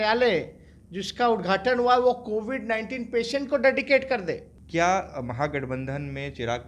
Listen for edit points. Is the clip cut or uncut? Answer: cut